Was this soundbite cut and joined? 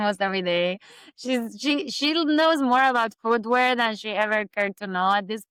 no; 0 cuts

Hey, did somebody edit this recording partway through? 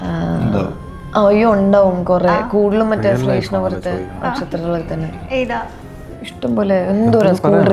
no; 0 cuts

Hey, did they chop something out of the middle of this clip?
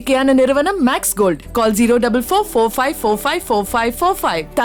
no; 0 cuts

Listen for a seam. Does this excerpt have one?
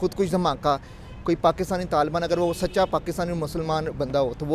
no; 0 cuts

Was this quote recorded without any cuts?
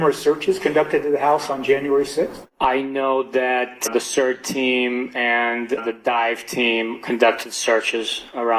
yes; 0 cuts

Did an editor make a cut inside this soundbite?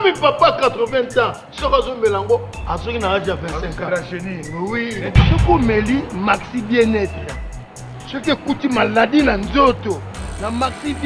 no; 0 cuts

